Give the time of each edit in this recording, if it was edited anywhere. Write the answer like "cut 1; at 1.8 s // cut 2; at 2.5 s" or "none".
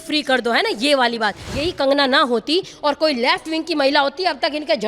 cut 1; at 1.5 s